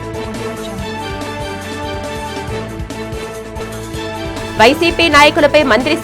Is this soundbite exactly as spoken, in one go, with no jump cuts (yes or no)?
no